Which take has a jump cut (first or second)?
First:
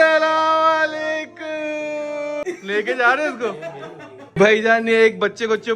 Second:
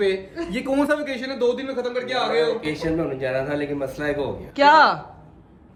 first